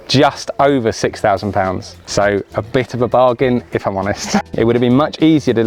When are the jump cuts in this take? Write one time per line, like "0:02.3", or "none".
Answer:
0:01.9
0:04.4